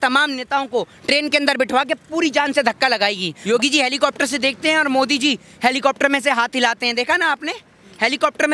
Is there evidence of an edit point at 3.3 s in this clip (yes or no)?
yes